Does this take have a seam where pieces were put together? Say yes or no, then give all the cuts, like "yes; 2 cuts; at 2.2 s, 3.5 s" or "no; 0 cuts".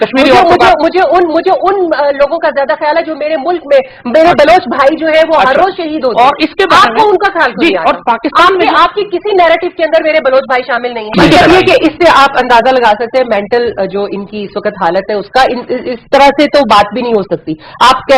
yes; 1 cut; at 11.1 s